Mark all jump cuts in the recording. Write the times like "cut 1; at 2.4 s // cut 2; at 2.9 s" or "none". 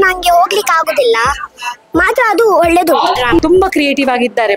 cut 1; at 3.4 s